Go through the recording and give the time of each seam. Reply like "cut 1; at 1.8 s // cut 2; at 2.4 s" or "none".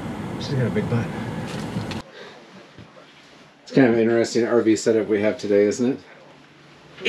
cut 1; at 2.0 s